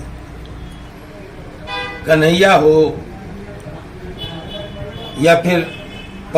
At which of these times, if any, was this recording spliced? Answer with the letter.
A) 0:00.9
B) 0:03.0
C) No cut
A